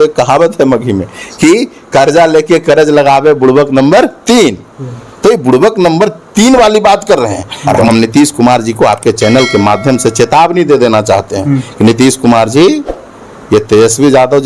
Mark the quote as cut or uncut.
cut